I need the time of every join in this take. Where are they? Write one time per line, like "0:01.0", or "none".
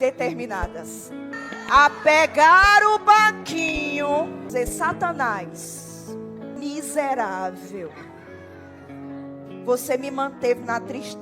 0:01.3
0:04.5
0:06.6